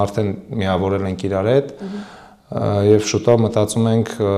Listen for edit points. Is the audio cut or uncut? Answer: uncut